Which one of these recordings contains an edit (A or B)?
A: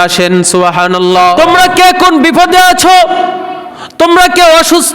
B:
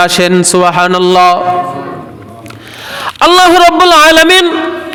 A